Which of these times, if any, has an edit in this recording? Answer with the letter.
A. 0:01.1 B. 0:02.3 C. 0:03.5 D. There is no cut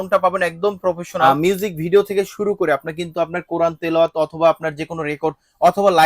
A